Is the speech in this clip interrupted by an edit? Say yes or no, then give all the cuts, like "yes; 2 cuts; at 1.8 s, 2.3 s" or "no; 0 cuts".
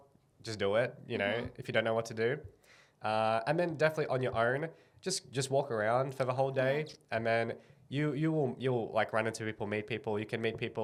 no; 0 cuts